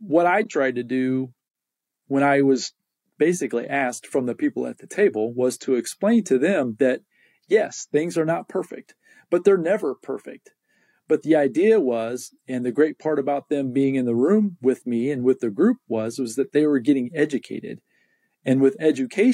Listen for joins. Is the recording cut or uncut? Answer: uncut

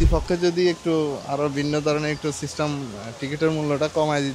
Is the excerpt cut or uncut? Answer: uncut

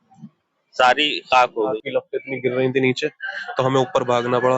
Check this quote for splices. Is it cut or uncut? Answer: cut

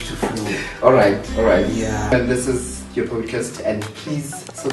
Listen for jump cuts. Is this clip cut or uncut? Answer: cut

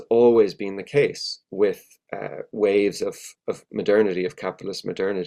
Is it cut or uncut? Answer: uncut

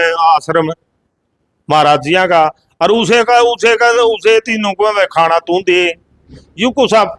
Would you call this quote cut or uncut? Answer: uncut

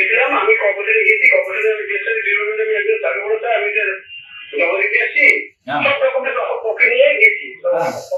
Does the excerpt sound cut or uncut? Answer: uncut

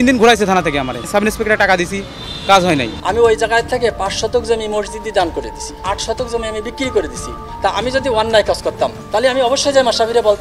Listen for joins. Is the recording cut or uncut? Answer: cut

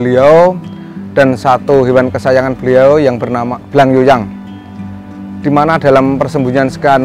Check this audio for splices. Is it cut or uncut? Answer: cut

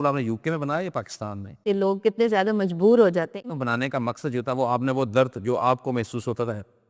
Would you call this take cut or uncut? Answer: cut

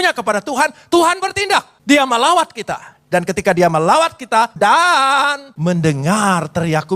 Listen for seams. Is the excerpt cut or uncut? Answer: cut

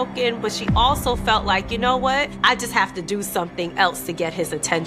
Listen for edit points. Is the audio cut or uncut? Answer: cut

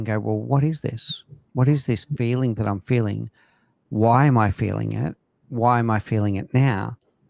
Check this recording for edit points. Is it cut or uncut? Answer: uncut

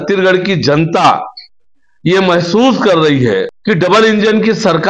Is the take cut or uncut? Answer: cut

